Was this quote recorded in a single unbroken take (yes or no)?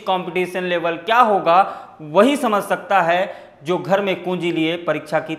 yes